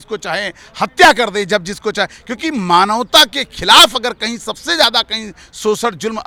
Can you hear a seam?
no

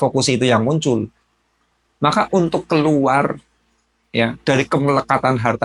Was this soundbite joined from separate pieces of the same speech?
no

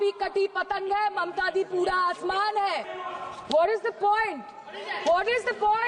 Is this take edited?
yes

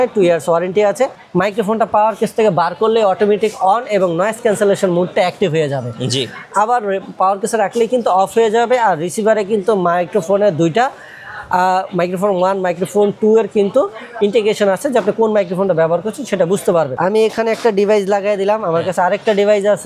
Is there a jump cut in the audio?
yes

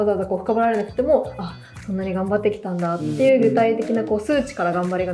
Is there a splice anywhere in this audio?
no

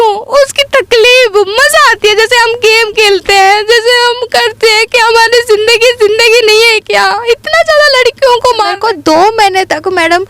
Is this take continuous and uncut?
no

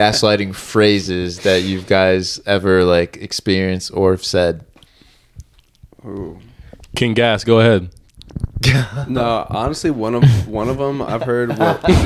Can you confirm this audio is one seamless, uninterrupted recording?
yes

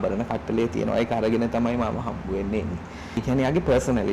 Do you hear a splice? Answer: yes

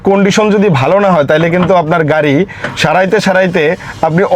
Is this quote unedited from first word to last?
yes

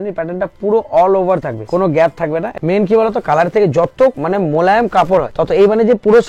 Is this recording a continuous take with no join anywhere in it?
no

